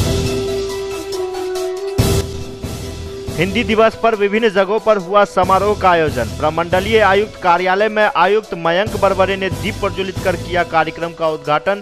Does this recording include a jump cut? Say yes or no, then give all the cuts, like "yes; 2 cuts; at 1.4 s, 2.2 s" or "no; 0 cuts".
yes; 1 cut; at 2.2 s